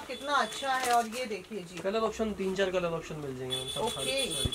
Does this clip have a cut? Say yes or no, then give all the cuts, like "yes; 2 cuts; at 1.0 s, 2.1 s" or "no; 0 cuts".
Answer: no; 0 cuts